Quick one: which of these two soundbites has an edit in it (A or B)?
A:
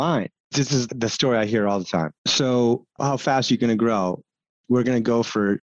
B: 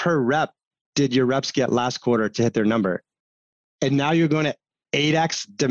A